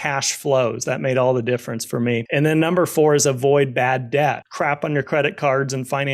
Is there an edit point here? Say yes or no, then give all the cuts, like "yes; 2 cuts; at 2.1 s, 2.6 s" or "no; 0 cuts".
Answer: yes; 2 cuts; at 2.3 s, 4.5 s